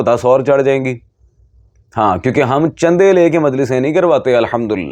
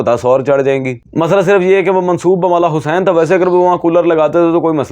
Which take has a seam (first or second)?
second